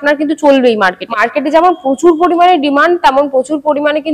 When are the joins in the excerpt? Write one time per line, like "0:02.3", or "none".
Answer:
0:01.1